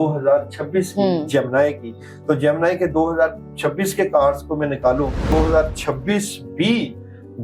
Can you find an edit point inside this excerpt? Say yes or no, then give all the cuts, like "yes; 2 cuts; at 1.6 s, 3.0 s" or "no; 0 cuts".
yes; 1 cut; at 5.3 s